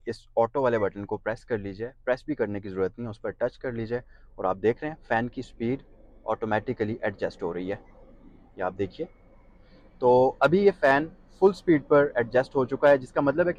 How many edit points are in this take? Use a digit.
0